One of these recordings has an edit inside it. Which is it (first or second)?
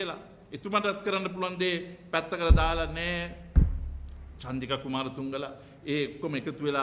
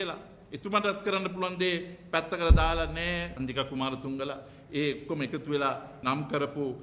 second